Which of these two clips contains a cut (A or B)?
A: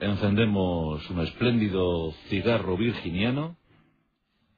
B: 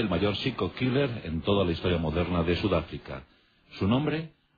B